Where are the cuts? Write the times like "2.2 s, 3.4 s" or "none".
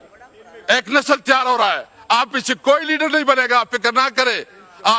none